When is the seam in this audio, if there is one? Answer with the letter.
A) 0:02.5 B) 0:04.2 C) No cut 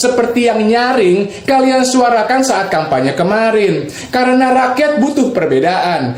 C